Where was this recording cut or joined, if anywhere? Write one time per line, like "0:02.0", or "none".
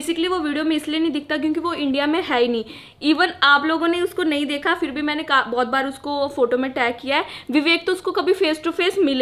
none